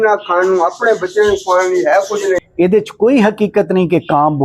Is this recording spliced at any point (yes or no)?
yes